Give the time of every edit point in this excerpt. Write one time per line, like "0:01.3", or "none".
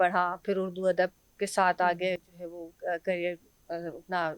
none